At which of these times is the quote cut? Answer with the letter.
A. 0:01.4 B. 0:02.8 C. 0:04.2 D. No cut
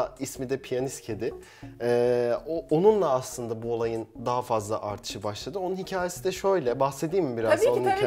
D